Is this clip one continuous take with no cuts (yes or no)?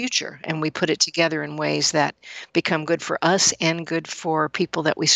yes